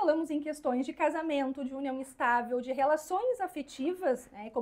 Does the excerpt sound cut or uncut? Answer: uncut